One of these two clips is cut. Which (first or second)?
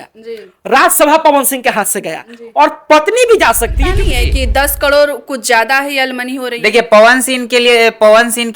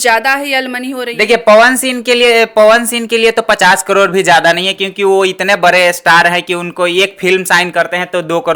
first